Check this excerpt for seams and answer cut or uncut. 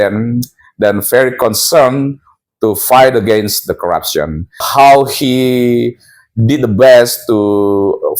cut